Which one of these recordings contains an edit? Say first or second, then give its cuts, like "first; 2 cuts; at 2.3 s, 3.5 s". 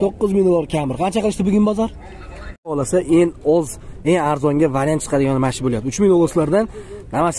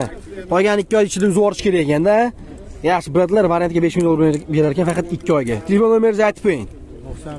first; 1 cut; at 2.7 s